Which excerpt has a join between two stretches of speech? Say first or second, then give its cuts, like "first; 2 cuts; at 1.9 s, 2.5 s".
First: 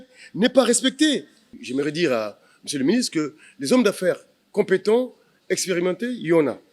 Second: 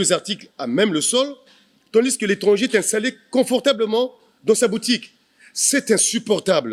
first; 1 cut; at 1.6 s